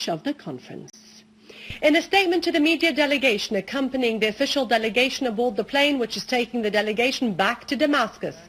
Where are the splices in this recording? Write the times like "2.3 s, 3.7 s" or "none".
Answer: 7.2 s